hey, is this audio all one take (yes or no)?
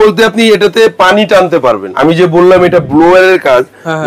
no